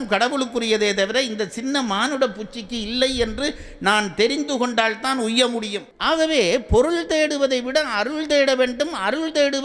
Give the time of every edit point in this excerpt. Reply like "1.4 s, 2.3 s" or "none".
5.9 s